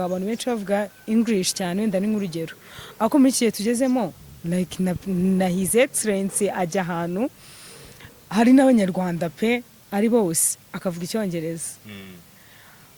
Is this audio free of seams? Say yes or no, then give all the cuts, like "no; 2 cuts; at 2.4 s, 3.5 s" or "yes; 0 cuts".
yes; 0 cuts